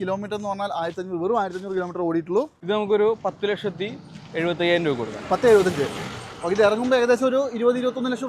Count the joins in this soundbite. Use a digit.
1